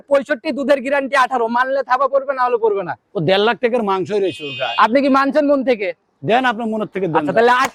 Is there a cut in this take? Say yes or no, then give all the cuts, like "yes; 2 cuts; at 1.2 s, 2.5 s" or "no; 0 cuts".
no; 0 cuts